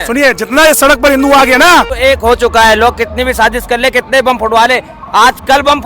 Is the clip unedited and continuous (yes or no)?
no